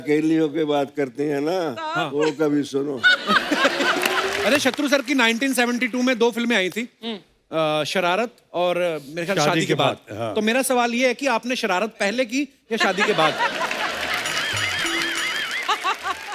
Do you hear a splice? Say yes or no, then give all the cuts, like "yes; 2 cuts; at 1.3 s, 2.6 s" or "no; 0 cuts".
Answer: yes; 1 cut; at 4.4 s